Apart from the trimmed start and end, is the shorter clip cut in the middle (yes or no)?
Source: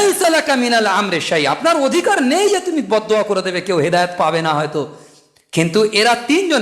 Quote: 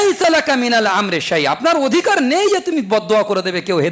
no